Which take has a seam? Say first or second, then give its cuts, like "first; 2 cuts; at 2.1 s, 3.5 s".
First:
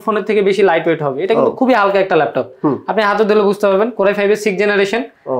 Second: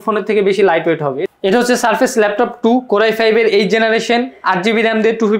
second; 1 cut; at 1.2 s